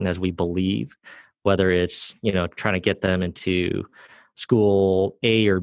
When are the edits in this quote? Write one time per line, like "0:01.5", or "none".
none